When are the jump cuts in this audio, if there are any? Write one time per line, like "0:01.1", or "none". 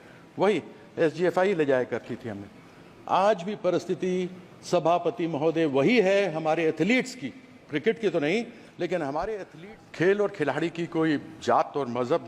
0:09.5